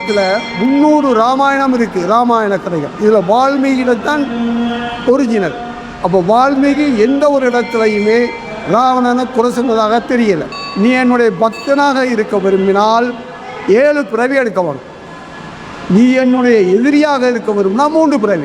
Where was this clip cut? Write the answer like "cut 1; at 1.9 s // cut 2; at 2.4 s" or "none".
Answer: cut 1; at 10.6 s